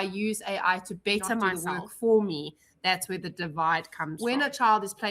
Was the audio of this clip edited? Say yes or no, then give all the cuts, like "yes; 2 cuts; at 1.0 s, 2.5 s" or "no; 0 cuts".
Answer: yes; 2 cuts; at 1.6 s, 4.1 s